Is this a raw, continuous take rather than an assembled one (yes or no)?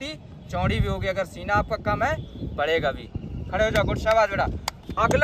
yes